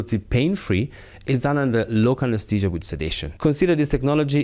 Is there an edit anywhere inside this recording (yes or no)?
yes